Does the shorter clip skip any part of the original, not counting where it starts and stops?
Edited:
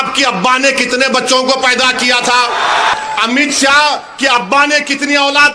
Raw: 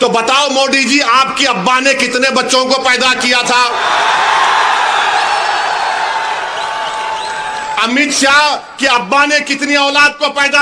yes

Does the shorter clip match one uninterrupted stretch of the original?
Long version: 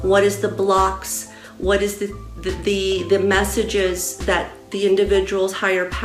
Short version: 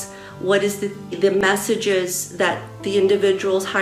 no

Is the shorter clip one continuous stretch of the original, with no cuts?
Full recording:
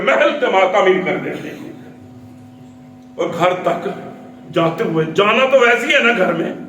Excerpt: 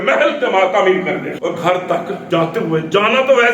no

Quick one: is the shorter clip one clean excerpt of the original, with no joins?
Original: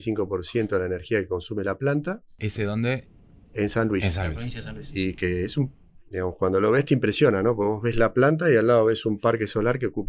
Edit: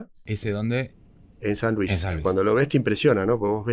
no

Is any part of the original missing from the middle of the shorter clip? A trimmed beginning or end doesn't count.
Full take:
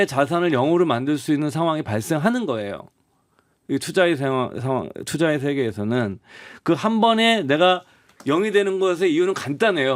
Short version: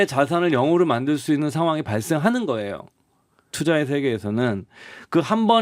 yes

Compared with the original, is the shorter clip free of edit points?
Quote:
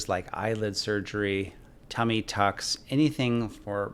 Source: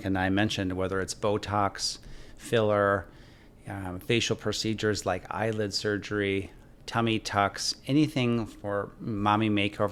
yes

